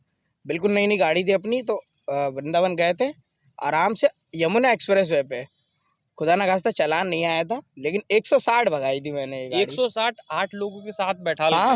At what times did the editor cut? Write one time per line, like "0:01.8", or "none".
none